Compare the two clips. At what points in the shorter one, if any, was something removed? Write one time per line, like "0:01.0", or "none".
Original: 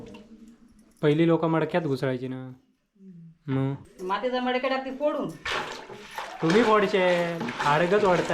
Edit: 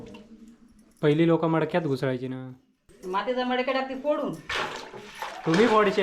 0:02.9